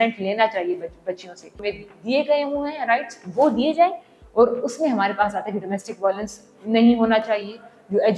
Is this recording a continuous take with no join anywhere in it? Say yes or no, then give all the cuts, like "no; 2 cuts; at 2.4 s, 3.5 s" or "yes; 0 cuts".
no; 1 cut; at 1.5 s